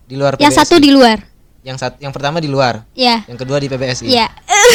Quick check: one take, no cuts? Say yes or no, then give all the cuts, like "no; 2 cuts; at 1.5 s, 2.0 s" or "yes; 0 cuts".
yes; 0 cuts